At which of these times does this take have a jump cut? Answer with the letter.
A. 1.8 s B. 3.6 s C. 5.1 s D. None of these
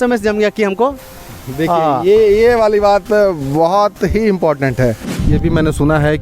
C